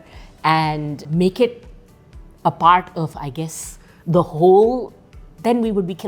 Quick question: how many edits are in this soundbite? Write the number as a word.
one